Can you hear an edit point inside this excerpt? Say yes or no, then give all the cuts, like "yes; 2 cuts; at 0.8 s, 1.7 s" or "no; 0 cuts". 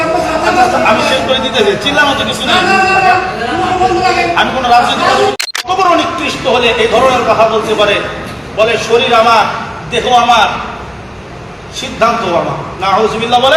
yes; 1 cut; at 5.3 s